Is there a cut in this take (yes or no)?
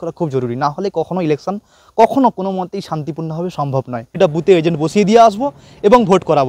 yes